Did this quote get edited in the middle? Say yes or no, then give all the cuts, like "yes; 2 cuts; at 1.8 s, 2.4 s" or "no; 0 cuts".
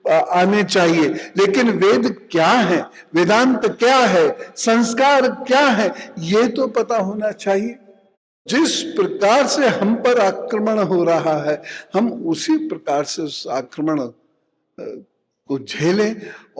yes; 1 cut; at 8.3 s